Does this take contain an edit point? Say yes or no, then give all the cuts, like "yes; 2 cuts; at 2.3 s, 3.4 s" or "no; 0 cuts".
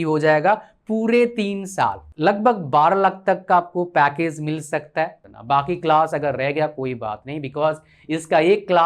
yes; 2 cuts; at 2.0 s, 5.2 s